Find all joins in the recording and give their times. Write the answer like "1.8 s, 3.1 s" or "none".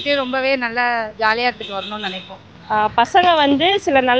none